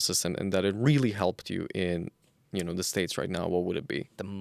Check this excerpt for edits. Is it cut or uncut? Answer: uncut